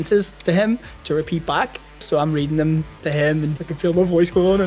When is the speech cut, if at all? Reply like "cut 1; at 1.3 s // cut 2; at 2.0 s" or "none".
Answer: cut 1; at 2.1 s // cut 2; at 3.5 s